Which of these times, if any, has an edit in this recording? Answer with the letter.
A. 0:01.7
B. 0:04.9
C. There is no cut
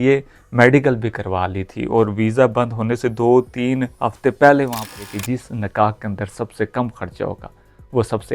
B